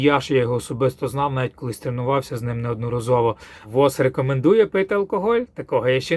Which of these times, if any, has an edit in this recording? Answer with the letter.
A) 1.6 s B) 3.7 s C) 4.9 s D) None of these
B